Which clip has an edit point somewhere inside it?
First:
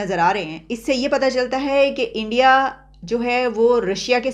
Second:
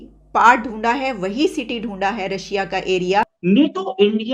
second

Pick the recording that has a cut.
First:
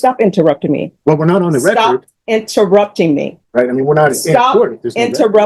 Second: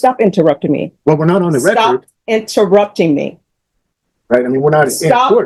first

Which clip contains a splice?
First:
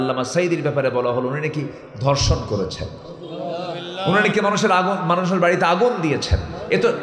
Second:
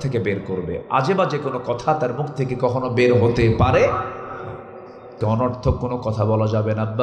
second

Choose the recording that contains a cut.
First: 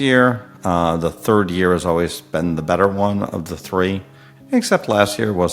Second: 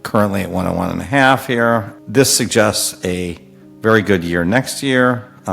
second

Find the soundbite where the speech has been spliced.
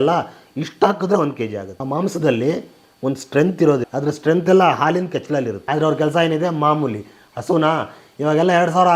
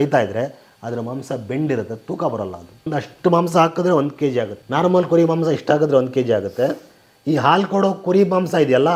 first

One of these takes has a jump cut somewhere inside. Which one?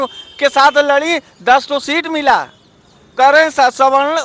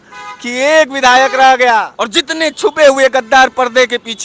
second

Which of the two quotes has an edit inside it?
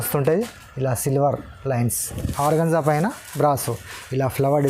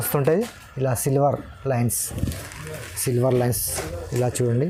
first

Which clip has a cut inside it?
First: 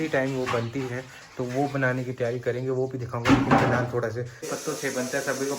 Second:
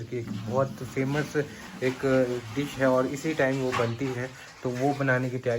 first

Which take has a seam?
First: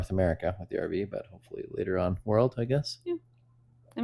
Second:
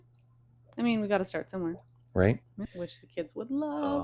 second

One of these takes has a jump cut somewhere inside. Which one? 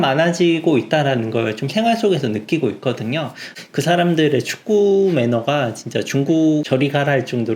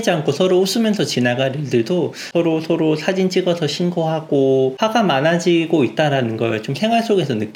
first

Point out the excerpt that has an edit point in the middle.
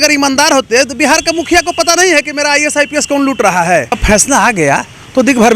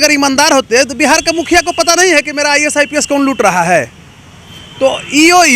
first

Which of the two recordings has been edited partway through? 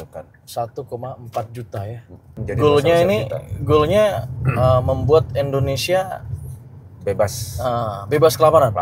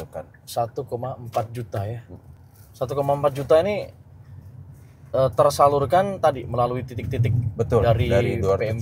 first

